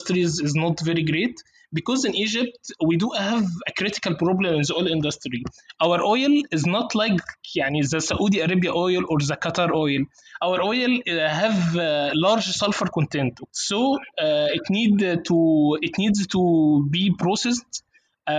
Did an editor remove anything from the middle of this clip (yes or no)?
yes